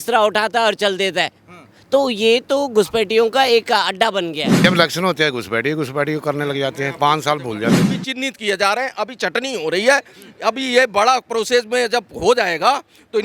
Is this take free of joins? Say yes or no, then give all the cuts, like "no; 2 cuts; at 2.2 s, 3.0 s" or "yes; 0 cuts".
no; 2 cuts; at 4.6 s, 8.0 s